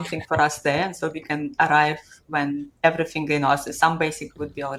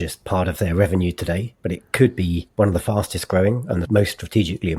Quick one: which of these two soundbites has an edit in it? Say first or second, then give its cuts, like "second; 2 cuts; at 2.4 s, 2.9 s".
second; 3 cuts; at 1.5 s, 2.4 s, 3.8 s